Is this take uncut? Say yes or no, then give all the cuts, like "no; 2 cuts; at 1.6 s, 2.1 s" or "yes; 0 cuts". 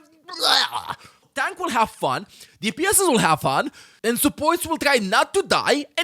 no; 1 cut; at 1.1 s